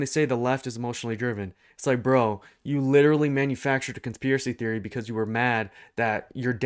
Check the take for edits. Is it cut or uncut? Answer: uncut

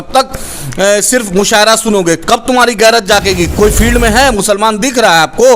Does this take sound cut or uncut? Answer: cut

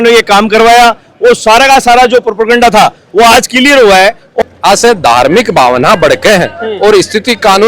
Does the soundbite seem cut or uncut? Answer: cut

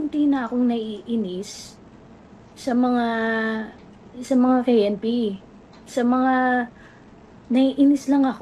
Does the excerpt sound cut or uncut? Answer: uncut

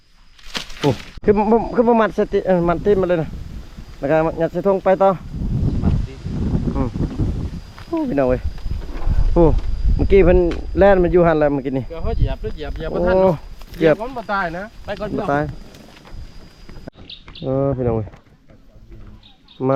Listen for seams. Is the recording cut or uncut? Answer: cut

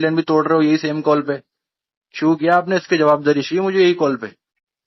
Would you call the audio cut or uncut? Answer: uncut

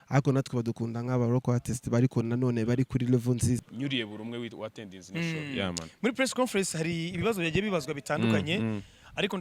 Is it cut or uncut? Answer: cut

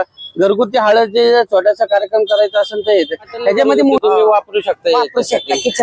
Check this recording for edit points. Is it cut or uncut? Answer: cut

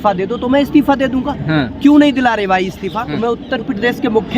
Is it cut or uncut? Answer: cut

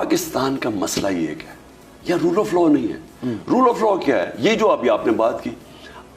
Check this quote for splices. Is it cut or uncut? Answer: uncut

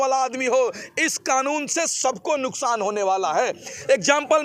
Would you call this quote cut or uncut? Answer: uncut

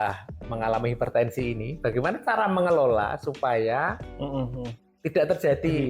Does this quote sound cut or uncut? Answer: uncut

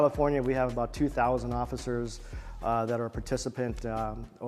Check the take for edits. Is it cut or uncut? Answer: uncut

